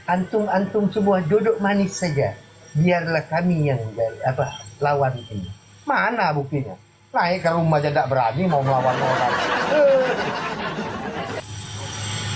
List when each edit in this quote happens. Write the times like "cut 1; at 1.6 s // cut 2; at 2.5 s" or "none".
none